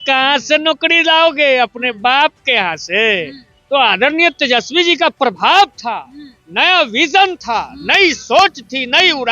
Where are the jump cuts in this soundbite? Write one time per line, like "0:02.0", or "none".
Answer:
none

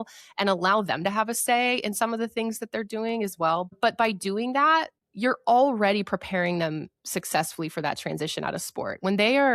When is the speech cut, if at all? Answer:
0:03.7
0:05.0

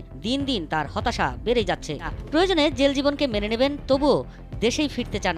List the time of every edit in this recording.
0:02.2

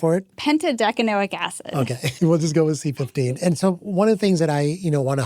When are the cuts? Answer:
0:02.1

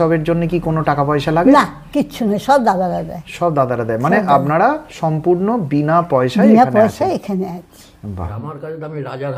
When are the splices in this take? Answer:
0:08.0

